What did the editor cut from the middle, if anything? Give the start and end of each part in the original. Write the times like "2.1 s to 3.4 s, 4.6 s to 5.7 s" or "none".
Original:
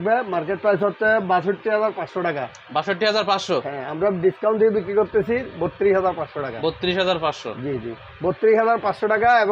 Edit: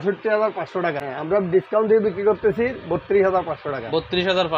2.5 s to 3.8 s